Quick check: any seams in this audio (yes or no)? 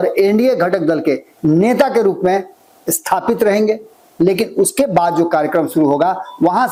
no